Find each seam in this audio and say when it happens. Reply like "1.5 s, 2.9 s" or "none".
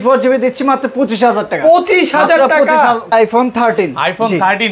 3.1 s